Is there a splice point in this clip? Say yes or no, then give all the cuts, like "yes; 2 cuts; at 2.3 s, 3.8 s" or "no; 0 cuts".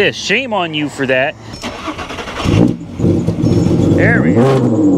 yes; 1 cut; at 1.5 s